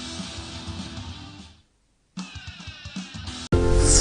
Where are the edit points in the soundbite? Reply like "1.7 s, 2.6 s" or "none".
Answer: 2.6 s